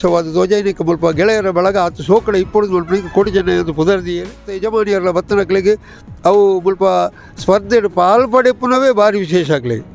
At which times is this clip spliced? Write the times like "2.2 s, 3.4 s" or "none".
4.6 s

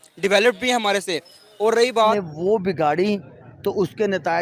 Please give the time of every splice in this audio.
2.1 s

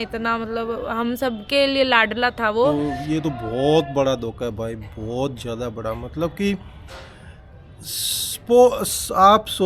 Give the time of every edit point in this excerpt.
2.7 s

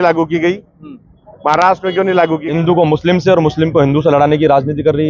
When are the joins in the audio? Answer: 2.5 s

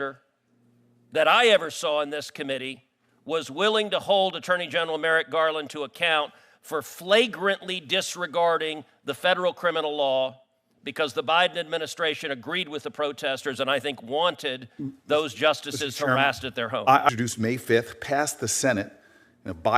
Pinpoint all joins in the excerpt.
17.1 s

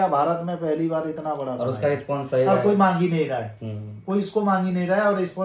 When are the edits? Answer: none

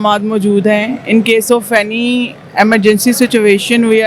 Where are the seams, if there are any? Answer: none

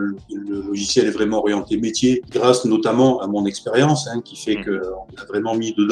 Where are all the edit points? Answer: none

